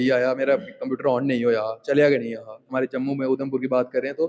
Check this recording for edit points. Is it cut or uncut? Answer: cut